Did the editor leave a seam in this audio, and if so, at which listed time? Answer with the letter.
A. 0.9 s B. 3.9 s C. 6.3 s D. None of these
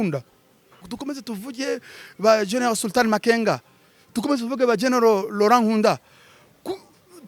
A